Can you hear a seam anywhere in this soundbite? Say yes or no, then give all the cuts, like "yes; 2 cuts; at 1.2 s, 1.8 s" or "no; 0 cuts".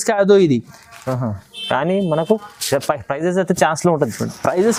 no; 0 cuts